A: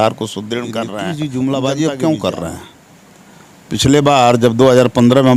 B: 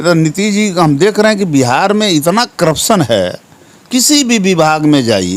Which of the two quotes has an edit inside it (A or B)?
A